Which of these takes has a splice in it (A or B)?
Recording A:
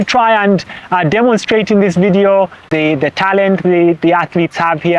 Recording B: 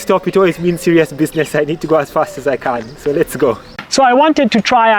B